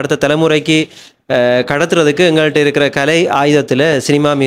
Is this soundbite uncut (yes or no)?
yes